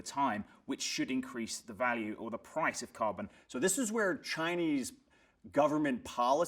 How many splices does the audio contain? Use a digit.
1